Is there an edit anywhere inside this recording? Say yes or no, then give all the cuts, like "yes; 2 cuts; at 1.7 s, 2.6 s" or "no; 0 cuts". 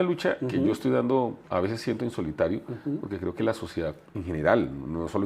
yes; 1 cut; at 4.1 s